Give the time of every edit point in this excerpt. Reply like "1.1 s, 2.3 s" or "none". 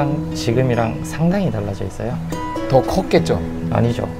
none